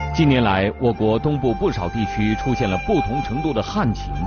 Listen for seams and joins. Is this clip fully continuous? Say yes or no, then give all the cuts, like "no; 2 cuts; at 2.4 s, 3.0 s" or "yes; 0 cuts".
yes; 0 cuts